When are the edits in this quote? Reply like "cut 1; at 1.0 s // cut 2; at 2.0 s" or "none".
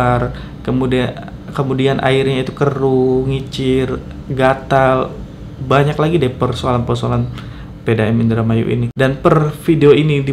cut 1; at 8.9 s